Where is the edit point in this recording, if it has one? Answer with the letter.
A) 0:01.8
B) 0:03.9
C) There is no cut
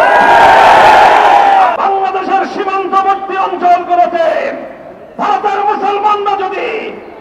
A